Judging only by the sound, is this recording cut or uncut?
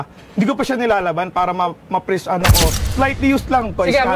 cut